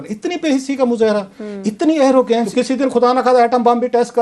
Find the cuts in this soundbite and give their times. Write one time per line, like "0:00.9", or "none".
0:02.5